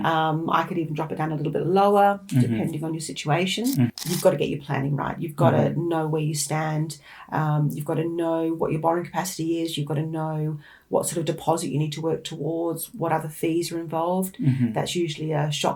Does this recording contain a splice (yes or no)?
yes